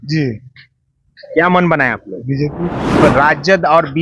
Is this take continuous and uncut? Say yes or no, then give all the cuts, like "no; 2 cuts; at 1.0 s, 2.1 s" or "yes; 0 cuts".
no; 1 cut; at 3.0 s